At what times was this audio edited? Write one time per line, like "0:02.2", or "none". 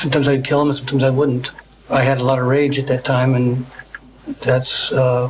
none